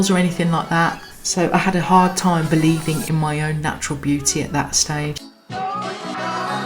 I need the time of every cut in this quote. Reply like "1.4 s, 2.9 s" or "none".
5.3 s